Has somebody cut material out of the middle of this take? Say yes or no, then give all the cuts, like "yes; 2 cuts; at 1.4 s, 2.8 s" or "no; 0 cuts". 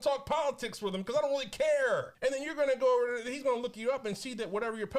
no; 0 cuts